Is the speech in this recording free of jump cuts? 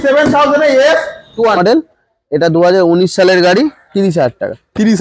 no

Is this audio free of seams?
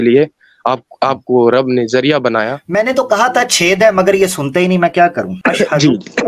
no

